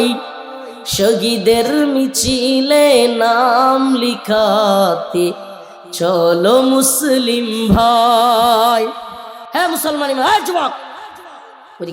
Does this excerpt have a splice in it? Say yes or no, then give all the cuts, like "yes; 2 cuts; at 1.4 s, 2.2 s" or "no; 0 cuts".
no; 0 cuts